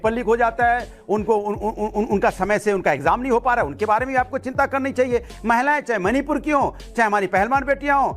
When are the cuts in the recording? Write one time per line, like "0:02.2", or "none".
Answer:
0:00.9